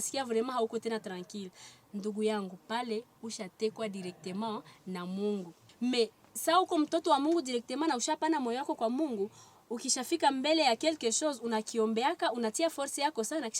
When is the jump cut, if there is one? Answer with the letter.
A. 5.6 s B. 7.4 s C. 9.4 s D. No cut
A